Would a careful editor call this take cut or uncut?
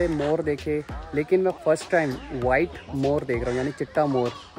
uncut